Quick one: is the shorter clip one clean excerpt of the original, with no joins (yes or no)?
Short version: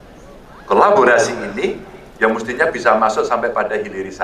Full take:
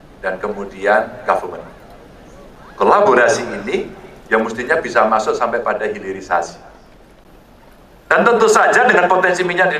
yes